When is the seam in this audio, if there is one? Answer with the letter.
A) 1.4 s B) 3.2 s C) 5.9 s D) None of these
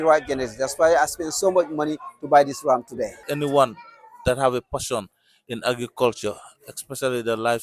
B